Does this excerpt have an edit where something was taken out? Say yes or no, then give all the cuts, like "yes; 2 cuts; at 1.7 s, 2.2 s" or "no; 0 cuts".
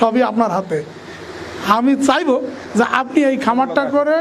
no; 0 cuts